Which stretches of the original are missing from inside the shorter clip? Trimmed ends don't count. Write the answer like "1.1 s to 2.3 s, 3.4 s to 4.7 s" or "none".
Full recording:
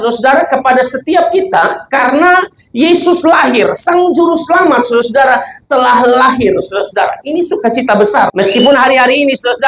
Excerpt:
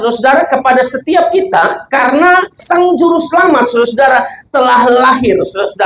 2.6 s to 3.8 s